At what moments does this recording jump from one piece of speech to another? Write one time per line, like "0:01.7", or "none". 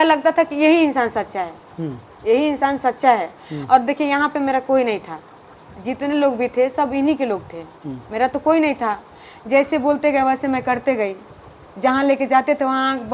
none